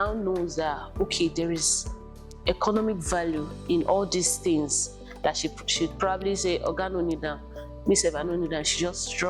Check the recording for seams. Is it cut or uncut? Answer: uncut